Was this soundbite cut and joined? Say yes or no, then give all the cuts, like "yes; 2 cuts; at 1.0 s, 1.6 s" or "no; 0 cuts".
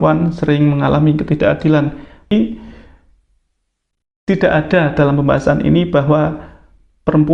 yes; 1 cut; at 2.3 s